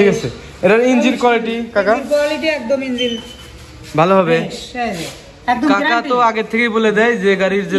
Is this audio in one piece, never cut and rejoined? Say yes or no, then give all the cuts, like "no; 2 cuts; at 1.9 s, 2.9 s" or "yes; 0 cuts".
yes; 0 cuts